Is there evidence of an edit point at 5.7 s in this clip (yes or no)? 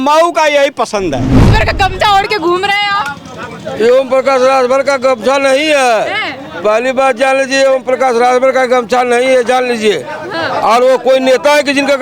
no